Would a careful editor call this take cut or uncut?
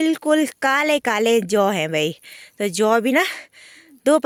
uncut